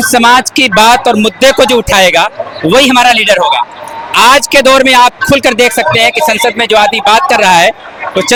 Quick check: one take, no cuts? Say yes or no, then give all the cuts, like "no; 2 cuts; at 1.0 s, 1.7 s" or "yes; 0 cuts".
yes; 0 cuts